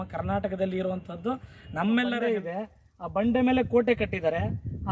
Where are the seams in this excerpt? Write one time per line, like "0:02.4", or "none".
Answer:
0:02.2